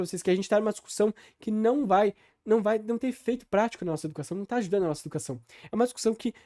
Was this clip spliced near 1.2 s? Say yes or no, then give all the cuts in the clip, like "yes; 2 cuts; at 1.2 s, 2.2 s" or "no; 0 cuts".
no; 0 cuts